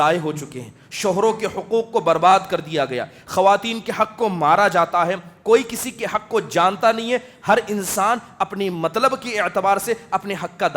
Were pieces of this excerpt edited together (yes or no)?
no